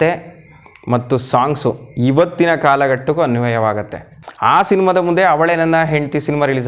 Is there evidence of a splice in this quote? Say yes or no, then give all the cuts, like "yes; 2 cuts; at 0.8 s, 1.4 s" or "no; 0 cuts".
yes; 1 cut; at 4.1 s